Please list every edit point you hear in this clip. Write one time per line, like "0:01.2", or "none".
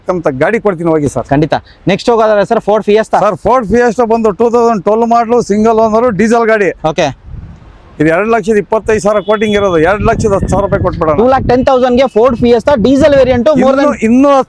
none